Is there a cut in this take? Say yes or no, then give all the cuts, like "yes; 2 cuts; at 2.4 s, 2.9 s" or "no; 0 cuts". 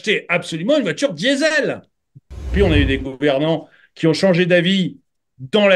yes; 1 cut; at 2.5 s